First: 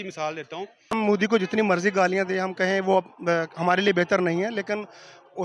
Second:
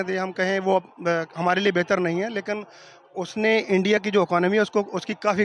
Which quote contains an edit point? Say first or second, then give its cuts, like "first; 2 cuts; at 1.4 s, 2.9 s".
first; 1 cut; at 0.9 s